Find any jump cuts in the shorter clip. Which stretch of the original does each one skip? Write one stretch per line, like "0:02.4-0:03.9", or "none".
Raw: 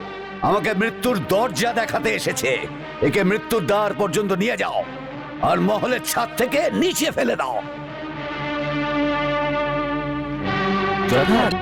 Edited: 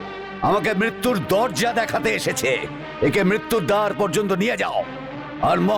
none